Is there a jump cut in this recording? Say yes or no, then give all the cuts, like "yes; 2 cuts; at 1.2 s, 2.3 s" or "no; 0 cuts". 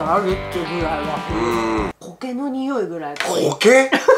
yes; 1 cut; at 2.3 s